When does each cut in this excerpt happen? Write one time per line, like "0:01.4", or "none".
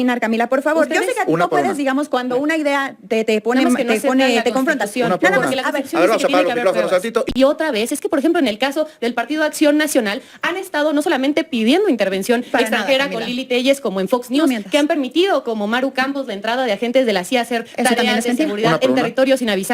0:07.3